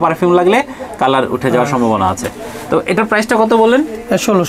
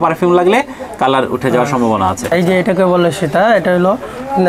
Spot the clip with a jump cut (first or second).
second